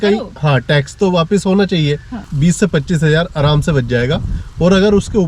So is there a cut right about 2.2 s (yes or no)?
yes